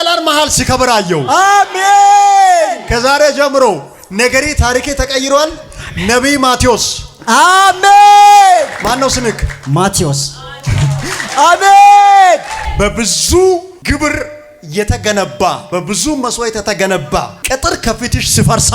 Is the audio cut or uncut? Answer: cut